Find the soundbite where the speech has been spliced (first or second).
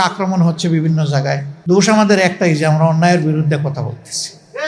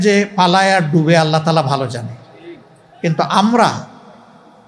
first